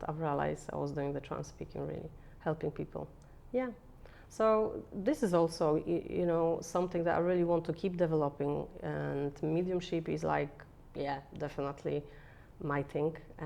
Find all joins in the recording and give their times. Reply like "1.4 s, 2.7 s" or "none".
none